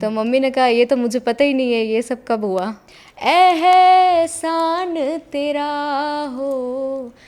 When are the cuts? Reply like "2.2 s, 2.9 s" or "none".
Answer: 2.8 s